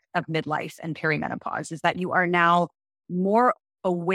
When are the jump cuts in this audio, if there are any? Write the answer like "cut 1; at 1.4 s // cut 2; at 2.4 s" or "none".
none